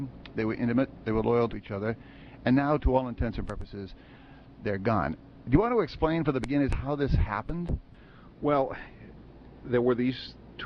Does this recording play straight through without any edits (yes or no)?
no